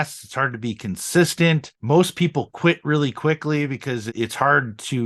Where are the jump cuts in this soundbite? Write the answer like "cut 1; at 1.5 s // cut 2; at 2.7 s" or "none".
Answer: cut 1; at 1.7 s // cut 2; at 4.1 s

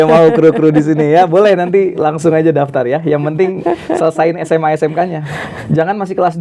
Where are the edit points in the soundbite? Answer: none

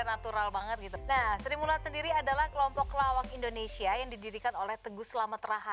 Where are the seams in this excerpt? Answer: cut 1; at 0.9 s

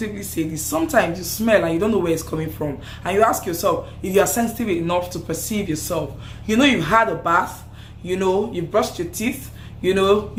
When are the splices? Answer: none

